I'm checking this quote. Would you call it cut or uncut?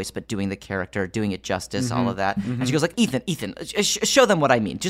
cut